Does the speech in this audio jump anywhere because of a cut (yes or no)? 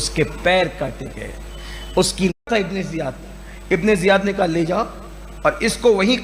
yes